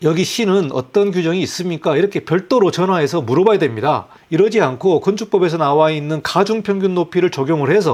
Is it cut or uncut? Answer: uncut